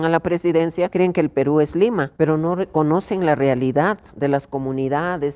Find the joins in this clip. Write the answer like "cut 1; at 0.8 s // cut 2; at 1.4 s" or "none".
cut 1; at 0.9 s // cut 2; at 2.1 s